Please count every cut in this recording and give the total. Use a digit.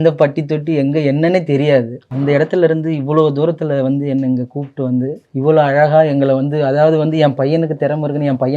2